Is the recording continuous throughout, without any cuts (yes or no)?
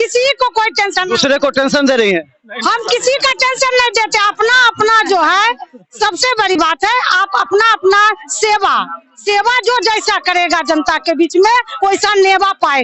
yes